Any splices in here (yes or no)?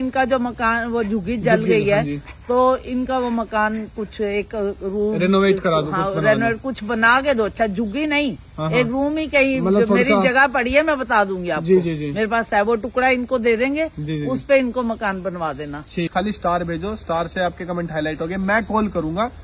yes